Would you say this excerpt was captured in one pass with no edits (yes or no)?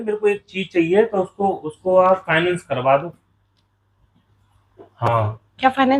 yes